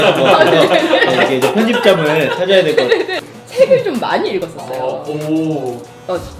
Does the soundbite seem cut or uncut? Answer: cut